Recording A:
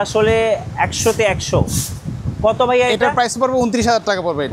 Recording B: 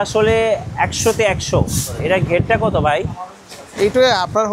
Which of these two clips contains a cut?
B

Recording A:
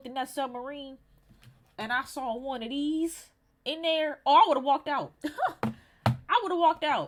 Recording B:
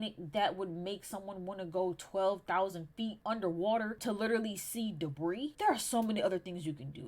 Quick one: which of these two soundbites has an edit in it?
B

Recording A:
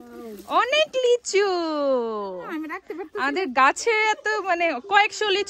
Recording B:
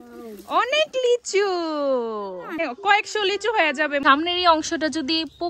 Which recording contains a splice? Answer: B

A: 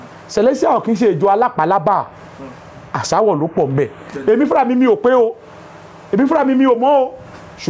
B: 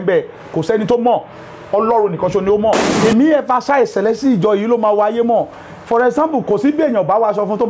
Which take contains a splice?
B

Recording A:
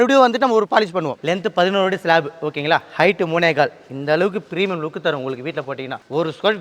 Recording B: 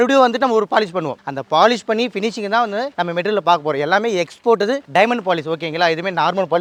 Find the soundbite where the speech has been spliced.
A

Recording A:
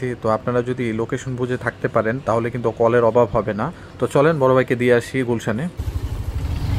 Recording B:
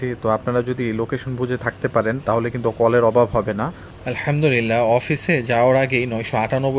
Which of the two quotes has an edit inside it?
B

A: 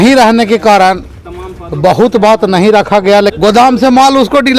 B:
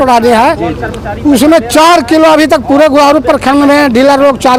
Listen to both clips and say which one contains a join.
A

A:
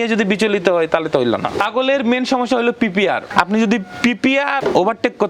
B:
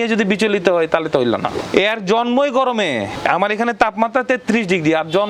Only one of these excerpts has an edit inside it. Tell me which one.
A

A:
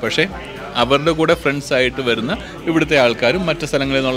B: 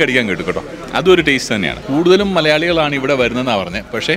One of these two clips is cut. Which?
B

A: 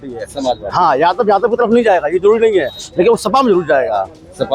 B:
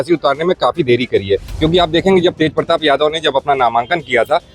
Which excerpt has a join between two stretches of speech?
B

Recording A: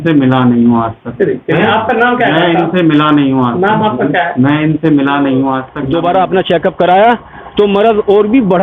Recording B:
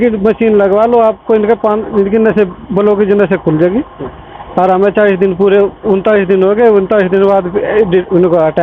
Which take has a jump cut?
A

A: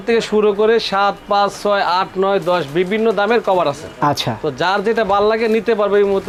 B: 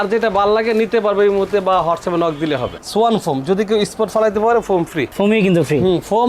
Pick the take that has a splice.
B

